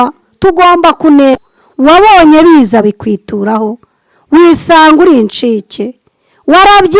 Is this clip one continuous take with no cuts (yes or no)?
no